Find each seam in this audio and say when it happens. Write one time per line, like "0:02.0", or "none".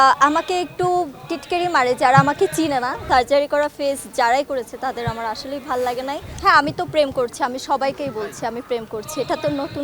0:03.0
0:06.3

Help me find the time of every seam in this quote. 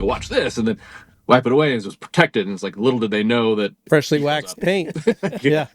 0:03.8

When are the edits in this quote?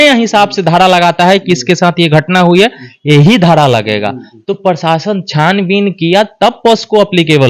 none

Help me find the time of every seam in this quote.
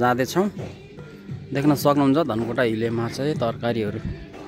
none

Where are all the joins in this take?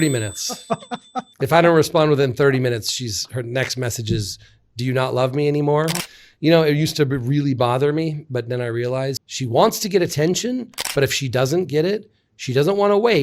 0:06.0
0:09.3

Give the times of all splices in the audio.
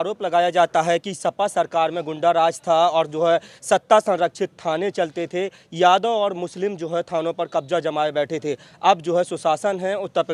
none

